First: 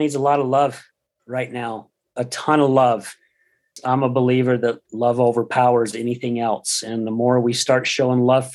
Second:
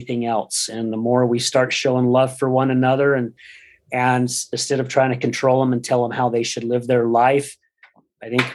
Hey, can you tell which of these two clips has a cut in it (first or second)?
first